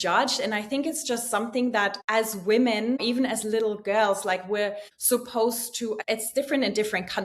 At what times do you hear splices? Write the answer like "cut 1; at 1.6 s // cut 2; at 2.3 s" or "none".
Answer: cut 1; at 2.0 s // cut 2; at 3.0 s // cut 3; at 4.9 s // cut 4; at 6.0 s